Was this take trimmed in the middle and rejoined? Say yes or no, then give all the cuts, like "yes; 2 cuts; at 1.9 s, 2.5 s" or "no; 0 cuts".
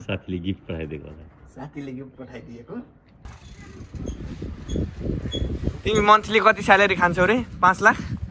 yes; 1 cut; at 3.4 s